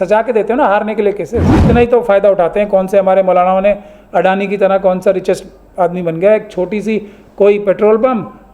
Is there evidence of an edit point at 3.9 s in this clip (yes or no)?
no